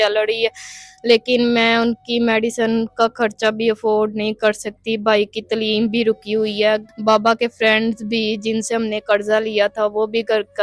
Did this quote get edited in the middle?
no; 0 cuts

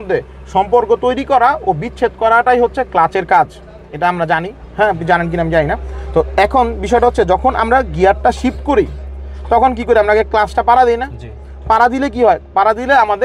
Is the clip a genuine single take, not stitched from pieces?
yes; 0 cuts

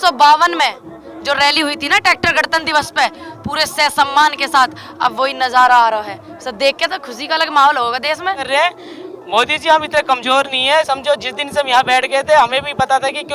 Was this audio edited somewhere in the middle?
yes; 1 cut; at 8.5 s

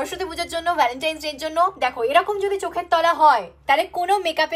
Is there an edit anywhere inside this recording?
no; 0 cuts

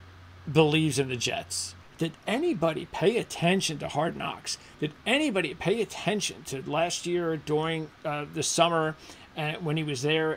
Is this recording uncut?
no; 1 cut; at 1.8 s

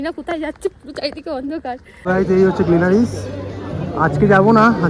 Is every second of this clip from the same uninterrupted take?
no; 1 cut; at 2.0 s

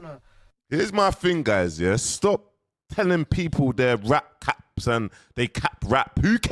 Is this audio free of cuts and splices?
yes; 0 cuts

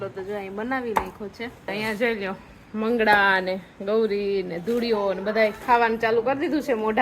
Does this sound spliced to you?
yes; 1 cut; at 1.7 s

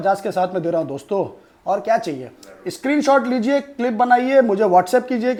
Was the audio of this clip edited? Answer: no; 0 cuts

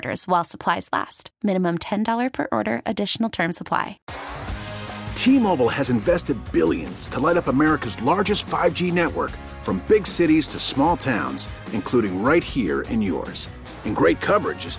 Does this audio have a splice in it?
yes; 1 cut; at 4.0 s

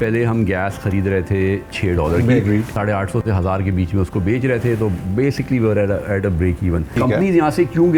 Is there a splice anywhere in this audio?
yes; 2 cuts; at 2.7 s, 6.9 s

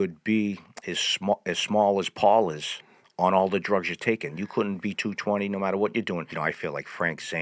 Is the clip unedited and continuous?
no; 1 cut; at 6.3 s

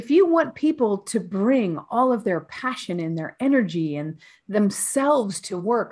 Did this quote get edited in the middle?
no; 0 cuts

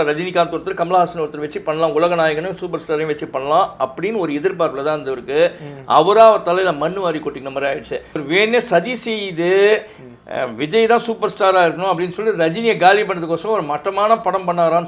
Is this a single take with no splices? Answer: no; 1 cut; at 8.2 s

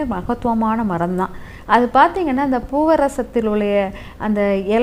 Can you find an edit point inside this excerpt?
no; 0 cuts

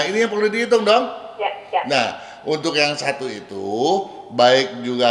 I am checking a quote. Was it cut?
no; 0 cuts

